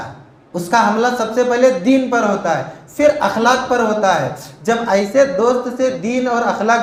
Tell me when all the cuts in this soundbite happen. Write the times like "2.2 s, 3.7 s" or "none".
none